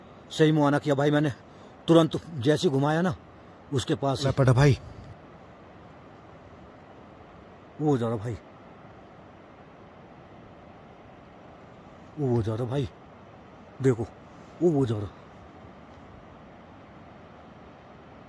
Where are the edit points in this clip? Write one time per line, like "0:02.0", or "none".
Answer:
none